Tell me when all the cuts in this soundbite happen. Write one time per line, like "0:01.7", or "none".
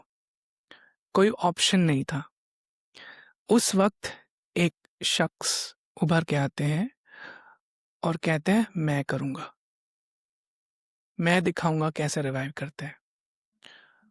none